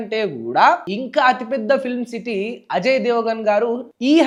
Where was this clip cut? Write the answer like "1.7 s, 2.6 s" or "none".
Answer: none